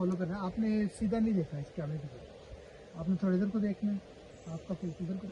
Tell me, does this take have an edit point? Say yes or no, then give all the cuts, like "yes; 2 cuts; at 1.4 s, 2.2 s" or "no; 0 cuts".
no; 0 cuts